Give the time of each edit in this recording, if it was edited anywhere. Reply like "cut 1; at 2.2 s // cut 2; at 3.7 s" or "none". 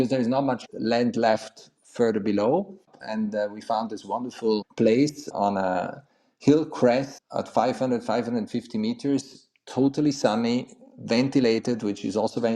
cut 1; at 2.9 s